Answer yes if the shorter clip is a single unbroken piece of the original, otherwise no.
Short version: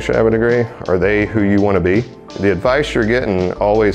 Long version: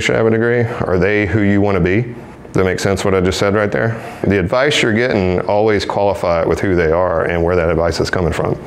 no